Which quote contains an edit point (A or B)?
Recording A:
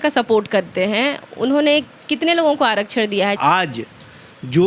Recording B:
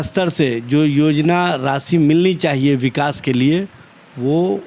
A